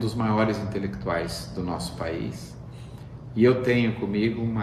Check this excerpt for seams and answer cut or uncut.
uncut